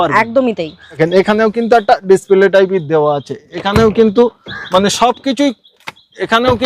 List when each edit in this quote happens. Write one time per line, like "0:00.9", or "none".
0:01.0